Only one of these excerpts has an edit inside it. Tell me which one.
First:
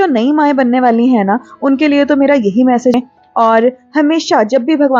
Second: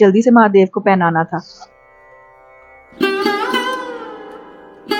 first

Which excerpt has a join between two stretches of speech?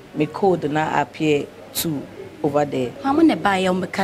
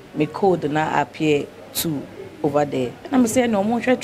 first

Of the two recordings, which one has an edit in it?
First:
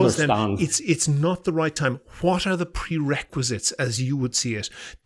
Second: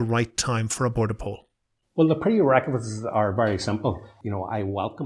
second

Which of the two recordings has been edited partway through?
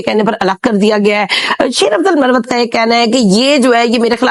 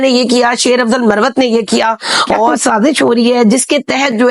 second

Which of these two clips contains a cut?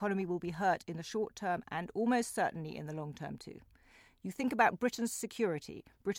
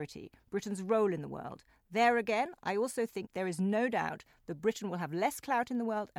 second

